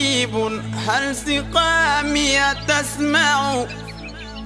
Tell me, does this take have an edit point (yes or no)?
no